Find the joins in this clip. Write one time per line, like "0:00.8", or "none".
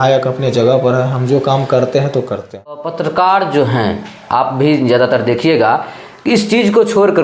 0:02.8